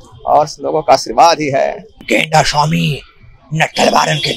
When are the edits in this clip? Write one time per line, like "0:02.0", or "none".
0:01.9